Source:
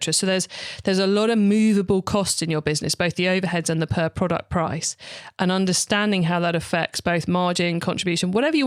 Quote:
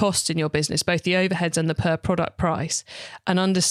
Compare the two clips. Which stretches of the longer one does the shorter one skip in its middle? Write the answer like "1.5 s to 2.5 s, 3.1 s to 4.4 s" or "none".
none

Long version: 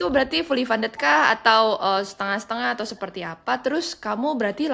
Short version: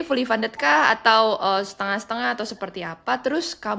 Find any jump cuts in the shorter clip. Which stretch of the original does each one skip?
none

